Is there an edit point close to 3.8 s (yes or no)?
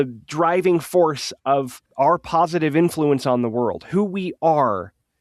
no